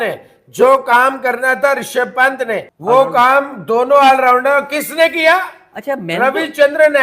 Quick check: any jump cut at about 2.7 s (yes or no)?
yes